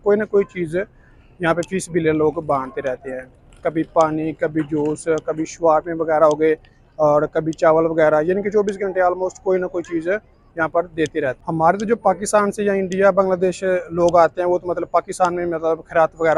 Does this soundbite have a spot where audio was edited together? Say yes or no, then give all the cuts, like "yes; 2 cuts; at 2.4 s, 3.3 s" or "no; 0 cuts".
no; 0 cuts